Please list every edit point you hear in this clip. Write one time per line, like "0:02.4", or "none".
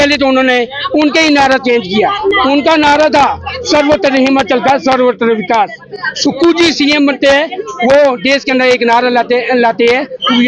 none

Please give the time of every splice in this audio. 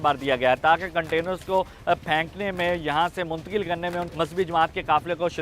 0:04.1

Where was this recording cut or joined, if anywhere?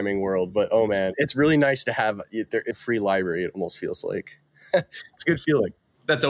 0:01.1
0:02.7

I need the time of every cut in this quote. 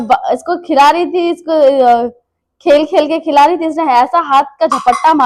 none

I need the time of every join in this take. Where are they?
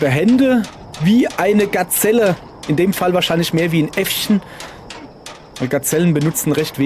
none

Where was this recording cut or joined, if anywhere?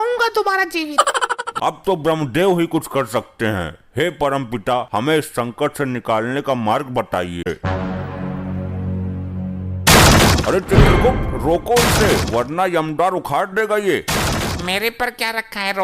0:01.5
0:07.5

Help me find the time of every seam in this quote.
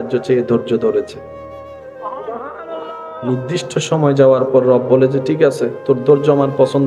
none

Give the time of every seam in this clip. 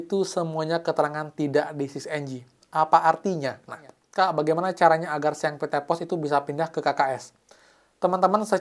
0:04.0

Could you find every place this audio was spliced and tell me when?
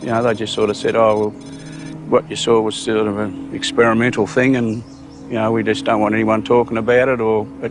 none

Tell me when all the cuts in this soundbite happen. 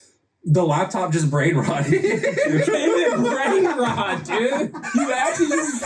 0:02.6
0:04.9

